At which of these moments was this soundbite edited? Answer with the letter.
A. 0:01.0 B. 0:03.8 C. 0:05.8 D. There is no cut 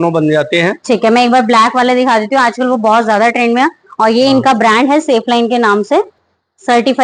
D